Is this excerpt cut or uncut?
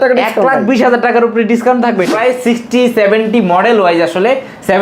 cut